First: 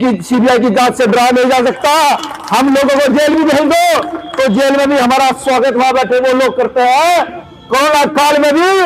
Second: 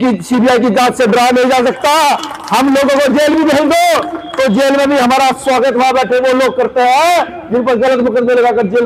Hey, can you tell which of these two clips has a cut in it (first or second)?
first